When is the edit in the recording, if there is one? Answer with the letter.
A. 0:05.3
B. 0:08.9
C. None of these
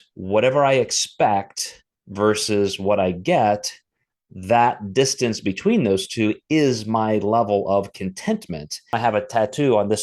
B